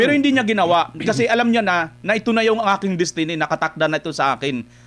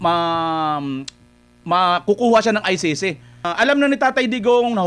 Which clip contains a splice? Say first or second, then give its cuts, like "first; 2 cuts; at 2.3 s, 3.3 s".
second; 1 cut; at 3.5 s